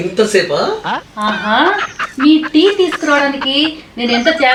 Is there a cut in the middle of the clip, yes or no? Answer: no